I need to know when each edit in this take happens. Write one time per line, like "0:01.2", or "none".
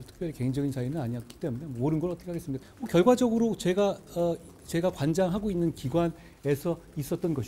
0:02.6